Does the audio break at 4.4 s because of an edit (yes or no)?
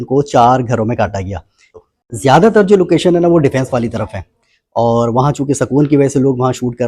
no